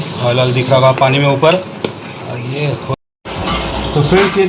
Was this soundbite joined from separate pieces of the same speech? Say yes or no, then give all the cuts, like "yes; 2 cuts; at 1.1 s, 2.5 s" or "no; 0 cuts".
yes; 1 cut; at 2.9 s